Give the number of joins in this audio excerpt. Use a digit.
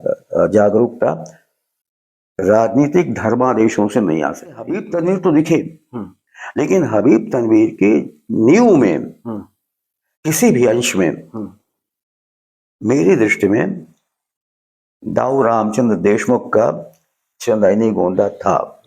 1